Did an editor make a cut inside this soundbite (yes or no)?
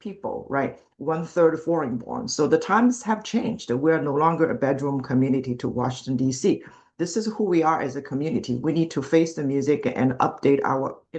no